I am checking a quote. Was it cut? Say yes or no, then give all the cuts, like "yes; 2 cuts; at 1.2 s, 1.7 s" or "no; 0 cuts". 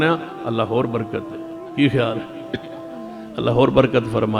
no; 0 cuts